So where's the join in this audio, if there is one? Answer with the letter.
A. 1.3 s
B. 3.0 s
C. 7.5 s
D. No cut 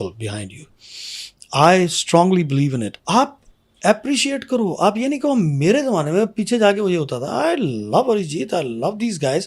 B